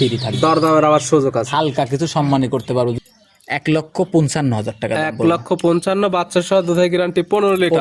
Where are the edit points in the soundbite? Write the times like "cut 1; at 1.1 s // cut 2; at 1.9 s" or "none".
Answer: cut 1; at 3.0 s